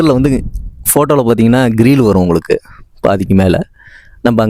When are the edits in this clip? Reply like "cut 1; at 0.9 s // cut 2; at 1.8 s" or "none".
none